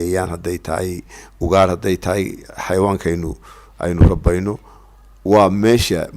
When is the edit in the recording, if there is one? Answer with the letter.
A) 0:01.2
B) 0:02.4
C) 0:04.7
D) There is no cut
D